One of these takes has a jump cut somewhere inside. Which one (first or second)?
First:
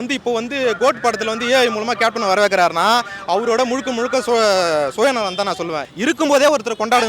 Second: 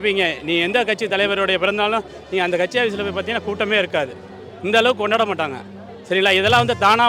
first